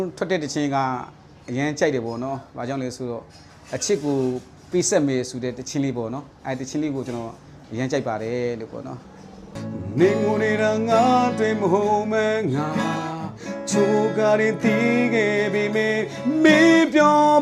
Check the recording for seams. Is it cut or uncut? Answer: uncut